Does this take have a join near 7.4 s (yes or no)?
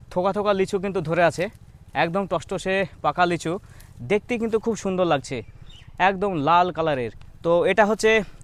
no